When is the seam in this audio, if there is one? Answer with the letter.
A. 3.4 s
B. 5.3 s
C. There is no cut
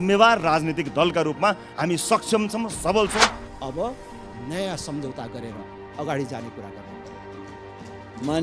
A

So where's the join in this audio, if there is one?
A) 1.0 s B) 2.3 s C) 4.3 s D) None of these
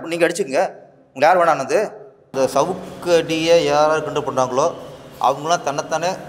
B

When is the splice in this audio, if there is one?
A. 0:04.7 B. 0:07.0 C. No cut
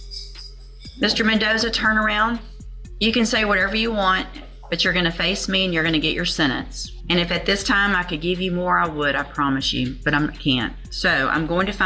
C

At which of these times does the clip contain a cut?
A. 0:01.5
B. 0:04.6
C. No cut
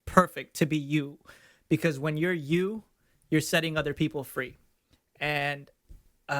C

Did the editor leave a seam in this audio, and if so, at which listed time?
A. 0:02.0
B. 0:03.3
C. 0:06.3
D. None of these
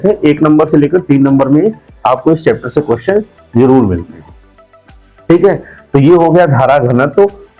D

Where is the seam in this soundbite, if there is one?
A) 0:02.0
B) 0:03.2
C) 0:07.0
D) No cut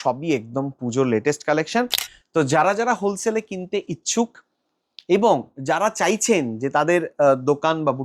A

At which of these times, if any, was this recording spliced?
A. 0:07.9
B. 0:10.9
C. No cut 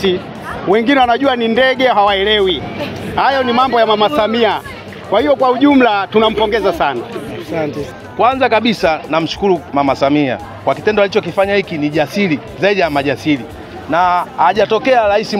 A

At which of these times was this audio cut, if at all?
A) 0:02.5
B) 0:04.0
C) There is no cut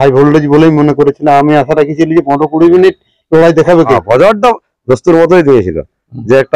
B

